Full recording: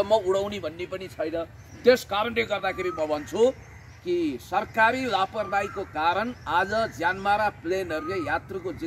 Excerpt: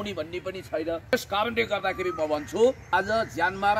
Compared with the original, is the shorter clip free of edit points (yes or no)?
no